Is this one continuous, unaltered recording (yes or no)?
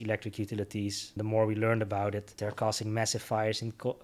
no